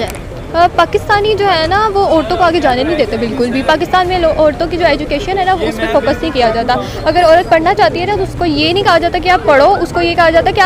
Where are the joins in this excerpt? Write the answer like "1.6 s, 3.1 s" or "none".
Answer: none